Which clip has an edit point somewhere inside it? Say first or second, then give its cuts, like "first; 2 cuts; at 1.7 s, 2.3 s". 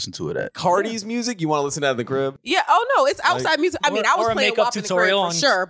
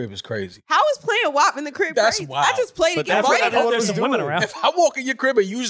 first; 1 cut; at 2.4 s